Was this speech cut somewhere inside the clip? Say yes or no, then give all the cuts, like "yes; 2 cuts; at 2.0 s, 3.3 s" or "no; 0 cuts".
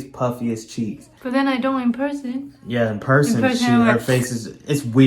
yes; 1 cut; at 1.1 s